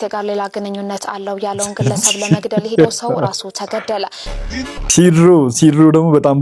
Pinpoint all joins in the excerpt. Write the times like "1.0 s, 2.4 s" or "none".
4.9 s